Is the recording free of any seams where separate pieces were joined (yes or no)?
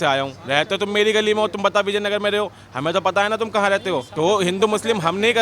no